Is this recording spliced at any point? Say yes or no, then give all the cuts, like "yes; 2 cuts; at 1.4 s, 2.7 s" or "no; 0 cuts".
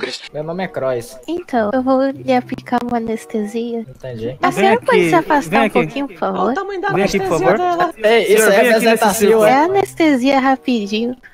no; 0 cuts